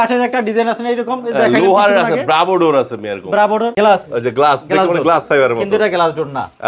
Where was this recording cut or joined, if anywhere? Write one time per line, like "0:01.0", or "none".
0:03.7